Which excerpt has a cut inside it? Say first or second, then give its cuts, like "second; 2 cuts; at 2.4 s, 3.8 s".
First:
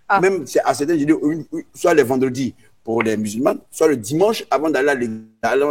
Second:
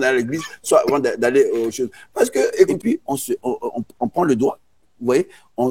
second; 1 cut; at 2.7 s